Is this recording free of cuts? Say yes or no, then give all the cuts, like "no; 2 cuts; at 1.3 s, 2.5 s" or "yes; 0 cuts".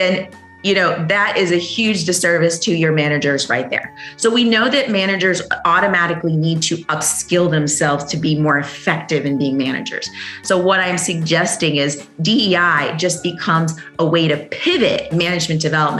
no; 1 cut; at 15.1 s